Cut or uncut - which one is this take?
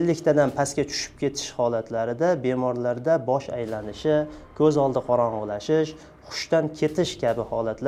uncut